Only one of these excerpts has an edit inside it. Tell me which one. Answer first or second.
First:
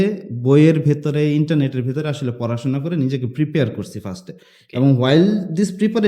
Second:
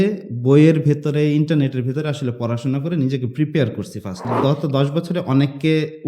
second